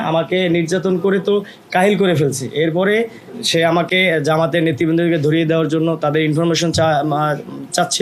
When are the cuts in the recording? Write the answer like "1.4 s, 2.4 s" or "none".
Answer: 3.2 s